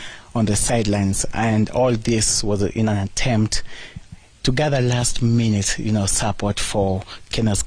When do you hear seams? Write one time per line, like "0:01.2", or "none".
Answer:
0:02.3